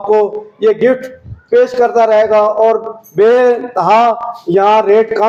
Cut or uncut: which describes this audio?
uncut